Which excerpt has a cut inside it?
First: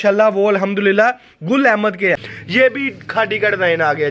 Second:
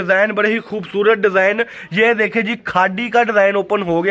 first; 1 cut; at 2.3 s

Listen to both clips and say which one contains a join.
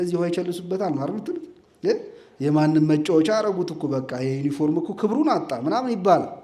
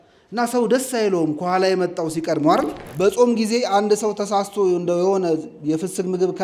second; 1 cut; at 2.8 s

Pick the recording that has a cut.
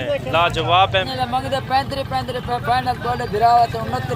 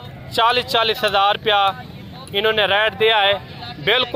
first; 1 cut; at 1.1 s

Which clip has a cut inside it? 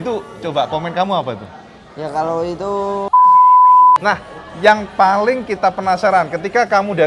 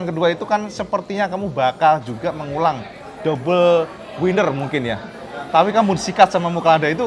first; 2 cuts; at 3.1 s, 4.0 s

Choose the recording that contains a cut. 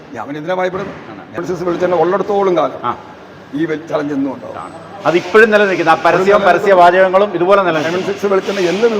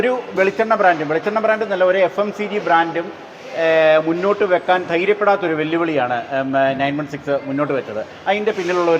first; 1 cut; at 1.4 s

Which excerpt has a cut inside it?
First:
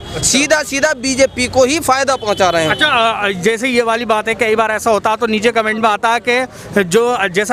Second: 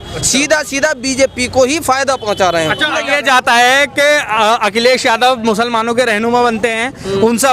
second; 1 cut; at 2.9 s

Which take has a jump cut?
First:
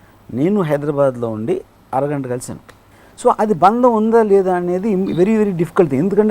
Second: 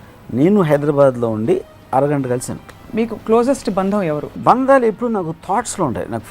second; 2 cuts; at 2.8 s, 4.3 s

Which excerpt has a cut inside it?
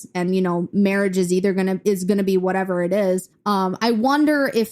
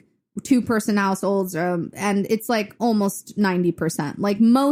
first; 1 cut; at 3.3 s

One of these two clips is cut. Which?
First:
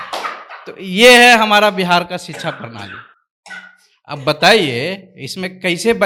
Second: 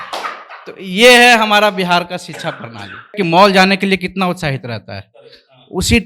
second; 1 cut; at 3.1 s

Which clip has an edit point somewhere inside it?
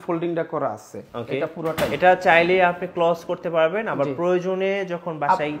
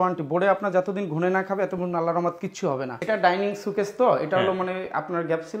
second; 1 cut; at 3.0 s

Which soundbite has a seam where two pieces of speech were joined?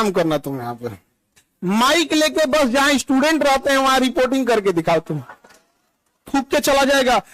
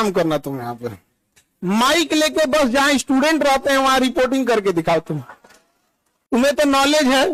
first; 1 cut; at 6.2 s

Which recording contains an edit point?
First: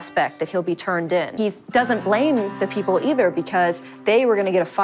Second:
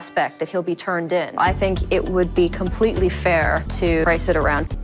second; 2 cuts; at 1.3 s, 3.9 s

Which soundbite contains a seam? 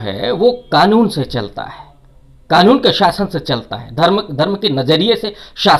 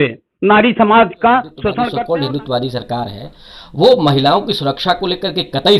second; 1 cut; at 1.8 s

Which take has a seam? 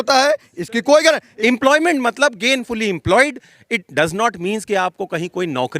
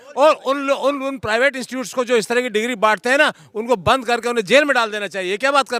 first; 1 cut; at 1.3 s

